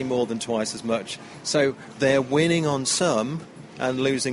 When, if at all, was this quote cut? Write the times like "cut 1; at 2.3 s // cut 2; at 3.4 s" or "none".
cut 1; at 1.4 s